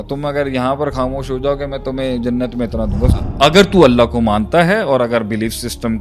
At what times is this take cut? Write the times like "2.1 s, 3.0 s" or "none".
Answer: 3.0 s